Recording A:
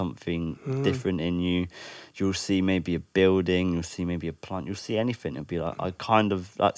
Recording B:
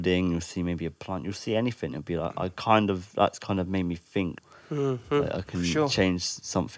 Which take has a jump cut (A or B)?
B